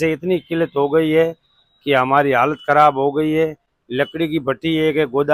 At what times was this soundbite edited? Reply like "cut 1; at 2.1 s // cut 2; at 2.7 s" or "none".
none